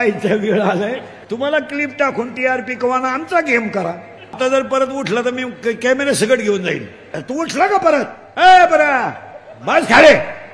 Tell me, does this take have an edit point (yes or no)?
yes